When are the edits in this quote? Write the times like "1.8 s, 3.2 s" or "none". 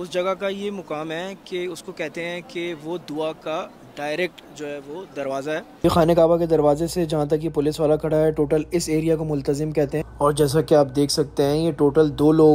5.8 s